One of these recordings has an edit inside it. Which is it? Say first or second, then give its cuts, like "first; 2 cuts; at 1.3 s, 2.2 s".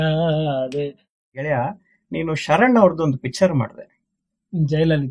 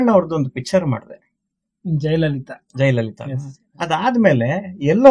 first; 1 cut; at 1.2 s